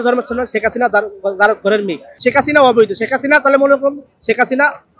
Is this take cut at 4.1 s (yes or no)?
no